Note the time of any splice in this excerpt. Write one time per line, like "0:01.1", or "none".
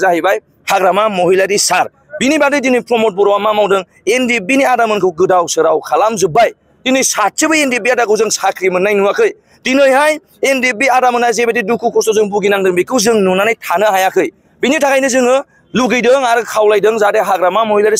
none